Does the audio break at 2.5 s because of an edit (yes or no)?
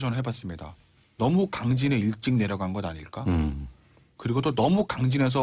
yes